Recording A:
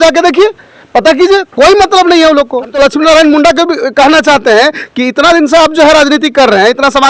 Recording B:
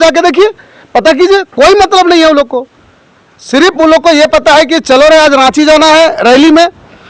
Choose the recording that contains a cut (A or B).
A